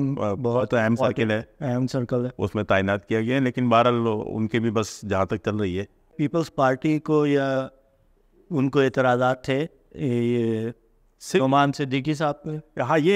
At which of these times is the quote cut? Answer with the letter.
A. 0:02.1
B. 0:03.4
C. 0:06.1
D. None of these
C